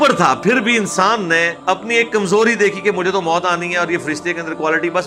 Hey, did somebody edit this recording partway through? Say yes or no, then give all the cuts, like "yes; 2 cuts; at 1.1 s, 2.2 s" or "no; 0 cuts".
yes; 1 cut; at 1.5 s